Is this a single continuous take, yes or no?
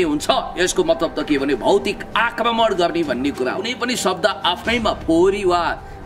no